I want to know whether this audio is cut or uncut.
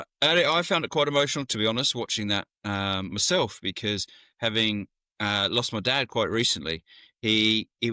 uncut